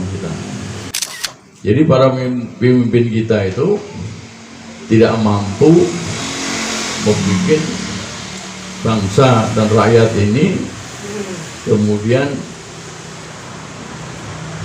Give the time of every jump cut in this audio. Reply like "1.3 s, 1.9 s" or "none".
0.9 s